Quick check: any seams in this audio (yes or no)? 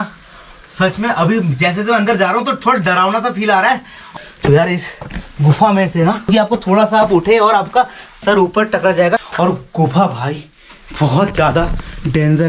yes